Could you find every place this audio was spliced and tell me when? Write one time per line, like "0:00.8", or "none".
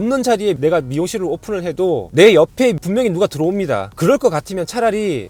none

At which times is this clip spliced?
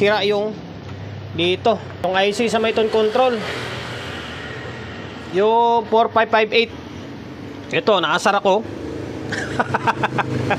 0:02.0

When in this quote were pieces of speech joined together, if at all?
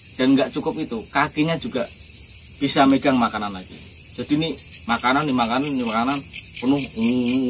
none

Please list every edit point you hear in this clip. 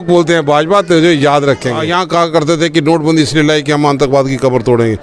0:01.8

